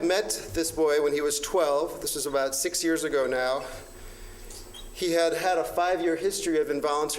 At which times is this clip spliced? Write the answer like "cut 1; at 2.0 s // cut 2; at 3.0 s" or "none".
cut 1; at 3.0 s